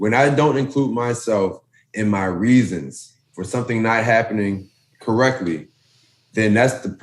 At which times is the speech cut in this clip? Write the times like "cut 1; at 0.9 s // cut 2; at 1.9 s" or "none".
none